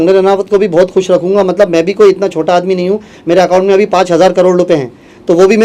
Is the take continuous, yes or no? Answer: yes